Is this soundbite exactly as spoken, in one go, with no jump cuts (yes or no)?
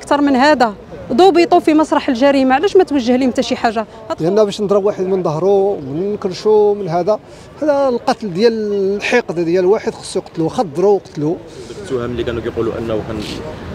no